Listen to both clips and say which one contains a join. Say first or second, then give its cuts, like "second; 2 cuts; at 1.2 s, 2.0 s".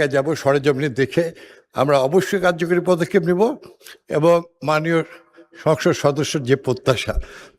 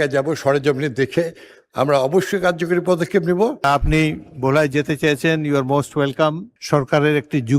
second; 2 cuts; at 3.6 s, 6.5 s